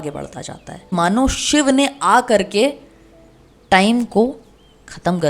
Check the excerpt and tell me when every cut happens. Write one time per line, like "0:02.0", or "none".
0:00.9